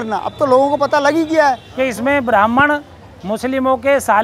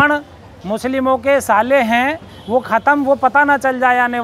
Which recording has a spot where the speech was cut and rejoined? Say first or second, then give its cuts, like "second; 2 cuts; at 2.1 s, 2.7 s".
first; 1 cut; at 1.7 s